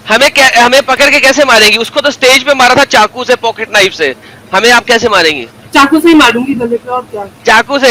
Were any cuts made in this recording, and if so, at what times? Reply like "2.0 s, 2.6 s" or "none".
none